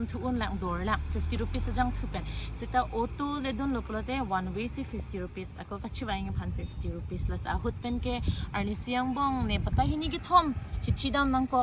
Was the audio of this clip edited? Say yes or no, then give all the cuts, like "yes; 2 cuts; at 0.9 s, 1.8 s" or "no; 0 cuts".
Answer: no; 0 cuts